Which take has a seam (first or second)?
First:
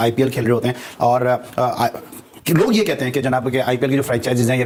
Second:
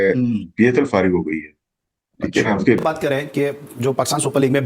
second